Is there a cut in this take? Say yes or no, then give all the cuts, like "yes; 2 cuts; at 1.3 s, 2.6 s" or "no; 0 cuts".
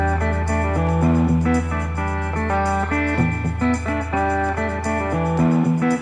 no; 0 cuts